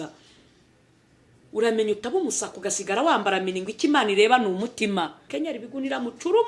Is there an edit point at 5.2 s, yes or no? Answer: yes